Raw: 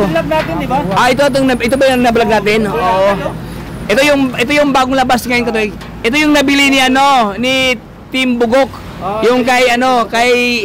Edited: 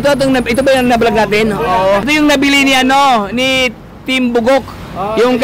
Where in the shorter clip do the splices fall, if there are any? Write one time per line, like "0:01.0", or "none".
0:02.1